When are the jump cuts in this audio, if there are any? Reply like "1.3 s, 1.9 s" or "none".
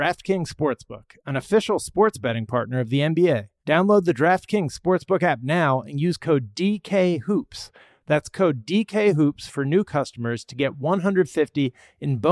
3.5 s

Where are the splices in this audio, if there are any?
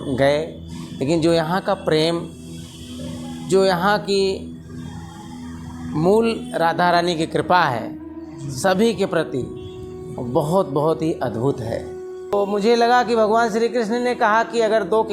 12.3 s

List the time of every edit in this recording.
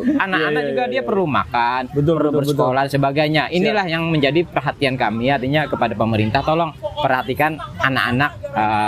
none

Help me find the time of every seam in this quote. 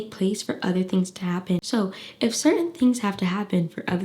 1.6 s

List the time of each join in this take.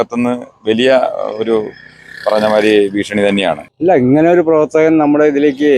3.7 s

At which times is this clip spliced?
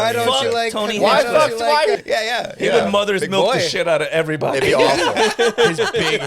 2.0 s

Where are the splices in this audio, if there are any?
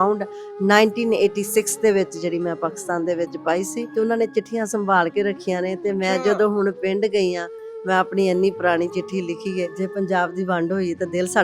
3.8 s, 9.7 s

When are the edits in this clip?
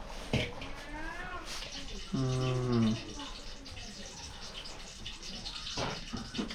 none

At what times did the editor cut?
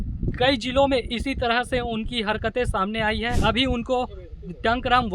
3.3 s

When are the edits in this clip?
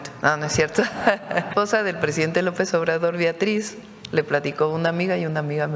1.5 s

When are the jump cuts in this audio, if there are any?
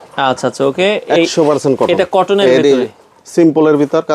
none

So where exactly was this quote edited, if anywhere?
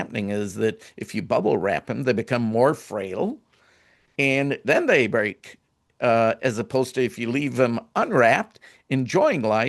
none

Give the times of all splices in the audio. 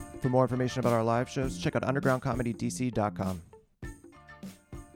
3.5 s

